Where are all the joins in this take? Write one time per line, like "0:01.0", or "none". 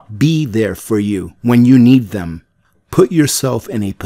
0:01.3
0:02.8